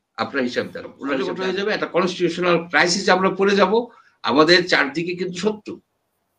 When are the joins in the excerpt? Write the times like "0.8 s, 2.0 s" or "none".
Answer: 1.3 s